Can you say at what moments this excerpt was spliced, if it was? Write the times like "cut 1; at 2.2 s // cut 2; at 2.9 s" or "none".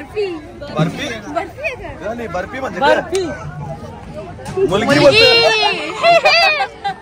none